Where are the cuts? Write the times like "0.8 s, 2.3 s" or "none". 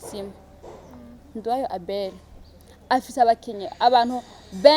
1.3 s

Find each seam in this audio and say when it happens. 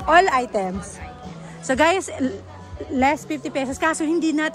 none

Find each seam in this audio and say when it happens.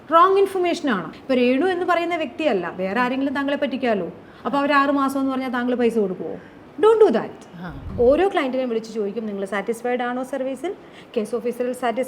1.1 s, 7.8 s

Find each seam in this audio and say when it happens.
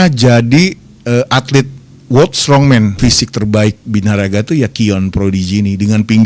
2.9 s

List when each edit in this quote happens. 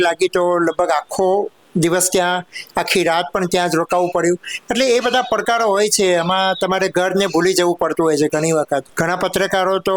8.9 s

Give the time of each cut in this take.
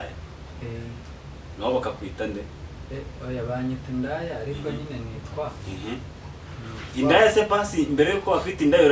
none

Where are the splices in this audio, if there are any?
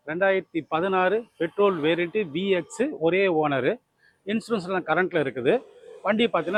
none

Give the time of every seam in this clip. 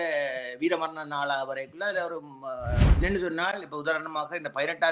3.0 s

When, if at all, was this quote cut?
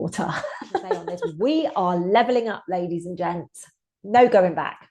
1.2 s

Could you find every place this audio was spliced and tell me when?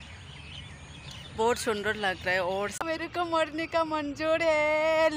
2.9 s

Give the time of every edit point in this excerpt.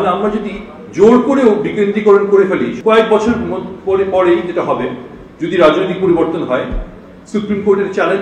2.7 s

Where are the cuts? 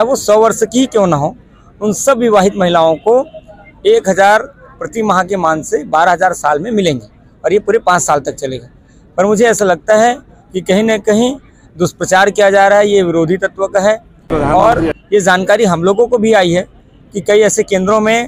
none

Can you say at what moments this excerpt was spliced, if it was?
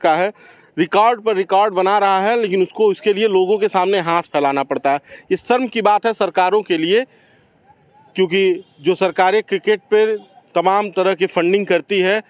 none

